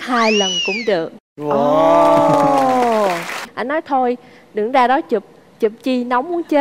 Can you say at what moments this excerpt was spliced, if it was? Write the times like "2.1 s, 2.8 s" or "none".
3.5 s